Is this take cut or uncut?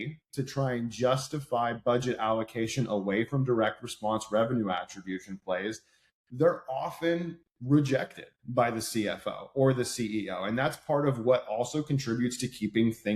uncut